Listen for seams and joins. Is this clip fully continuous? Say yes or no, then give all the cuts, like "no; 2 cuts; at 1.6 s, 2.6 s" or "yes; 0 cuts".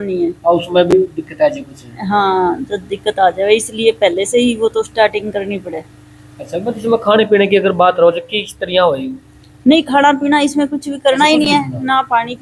yes; 0 cuts